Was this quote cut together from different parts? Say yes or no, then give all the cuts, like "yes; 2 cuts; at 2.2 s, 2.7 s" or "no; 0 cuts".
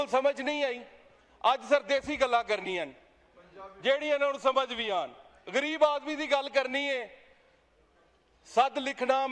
no; 0 cuts